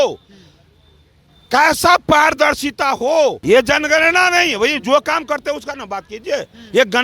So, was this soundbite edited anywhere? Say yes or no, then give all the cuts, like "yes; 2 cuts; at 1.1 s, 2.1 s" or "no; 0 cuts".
yes; 1 cut; at 3.4 s